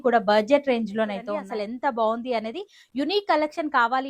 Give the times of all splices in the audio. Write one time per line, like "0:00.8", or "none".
0:01.2